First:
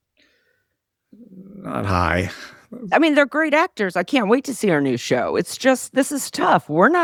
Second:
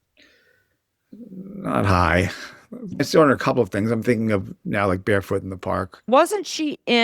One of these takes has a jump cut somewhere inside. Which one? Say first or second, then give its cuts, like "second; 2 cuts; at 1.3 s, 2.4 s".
second; 2 cuts; at 2.9 s, 6.1 s